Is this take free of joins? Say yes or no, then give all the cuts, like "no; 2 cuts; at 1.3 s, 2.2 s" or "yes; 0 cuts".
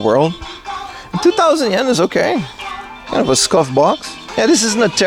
yes; 0 cuts